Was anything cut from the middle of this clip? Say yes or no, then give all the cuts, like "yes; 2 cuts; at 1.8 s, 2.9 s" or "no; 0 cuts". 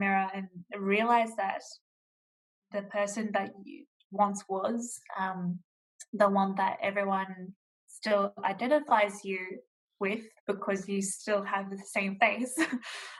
no; 0 cuts